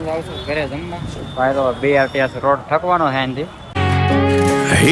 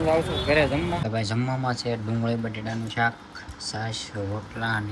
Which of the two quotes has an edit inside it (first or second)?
second